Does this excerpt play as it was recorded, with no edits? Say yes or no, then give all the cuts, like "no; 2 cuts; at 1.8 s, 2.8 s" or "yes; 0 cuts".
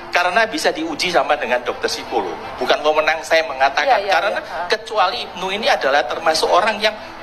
yes; 0 cuts